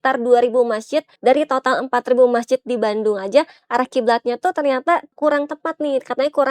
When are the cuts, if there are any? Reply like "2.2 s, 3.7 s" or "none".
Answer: 1.1 s, 5.1 s